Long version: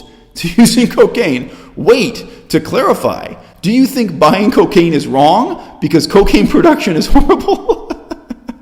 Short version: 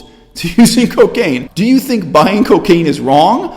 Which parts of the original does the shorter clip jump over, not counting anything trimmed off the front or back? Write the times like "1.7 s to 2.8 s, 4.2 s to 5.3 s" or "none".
1.5 s to 3.5 s